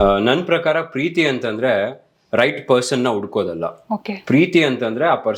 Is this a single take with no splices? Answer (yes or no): yes